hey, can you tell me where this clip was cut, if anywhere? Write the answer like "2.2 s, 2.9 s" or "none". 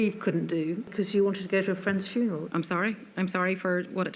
0.9 s, 2.4 s